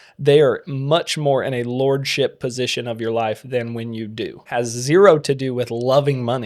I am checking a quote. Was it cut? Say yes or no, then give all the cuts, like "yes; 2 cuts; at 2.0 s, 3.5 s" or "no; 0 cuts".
yes; 1 cut; at 4.5 s